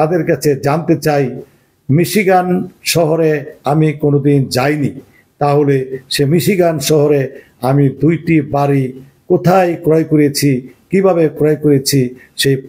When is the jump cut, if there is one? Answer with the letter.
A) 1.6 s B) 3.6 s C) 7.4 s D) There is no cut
D